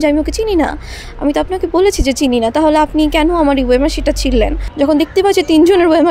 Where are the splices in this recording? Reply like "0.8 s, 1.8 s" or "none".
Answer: 4.6 s

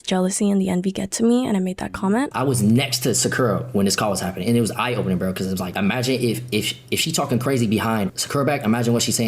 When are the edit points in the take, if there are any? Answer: 2.3 s, 5.7 s, 8.2 s

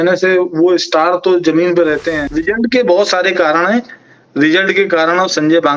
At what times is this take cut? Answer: 2.2 s

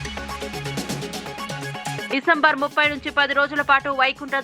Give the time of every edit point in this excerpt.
2.0 s

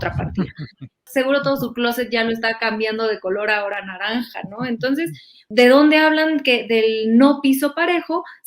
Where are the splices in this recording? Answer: 1.0 s, 5.4 s

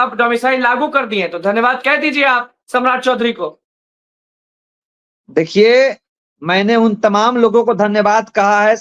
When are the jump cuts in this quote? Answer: none

